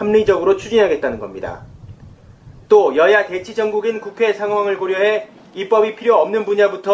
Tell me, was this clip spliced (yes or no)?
yes